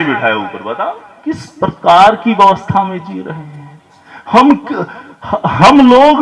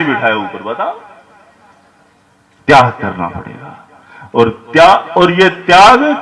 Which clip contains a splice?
first; 1 cut; at 1.5 s

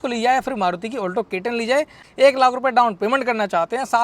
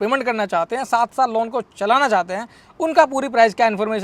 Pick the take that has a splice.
first; 1 cut; at 2.0 s

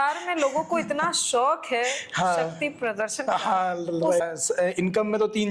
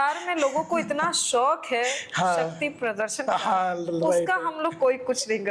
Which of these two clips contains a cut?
first; 1 cut; at 4.2 s

